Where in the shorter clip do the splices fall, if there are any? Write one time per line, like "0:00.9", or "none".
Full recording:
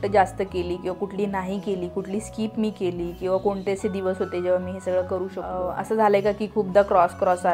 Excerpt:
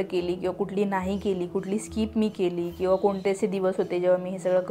none